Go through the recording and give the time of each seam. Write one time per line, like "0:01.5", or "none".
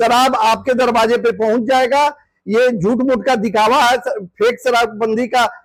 none